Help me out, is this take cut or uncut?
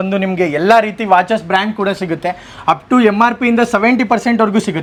uncut